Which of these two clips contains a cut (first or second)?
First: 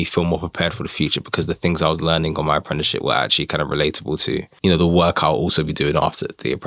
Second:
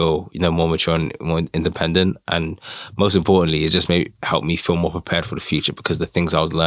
first